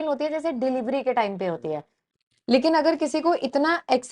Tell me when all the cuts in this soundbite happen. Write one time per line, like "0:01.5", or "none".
0:02.1